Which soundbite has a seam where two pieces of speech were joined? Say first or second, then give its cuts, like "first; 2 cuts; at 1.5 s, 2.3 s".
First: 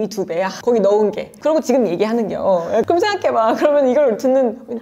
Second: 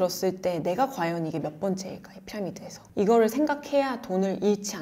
first; 1 cut; at 2.8 s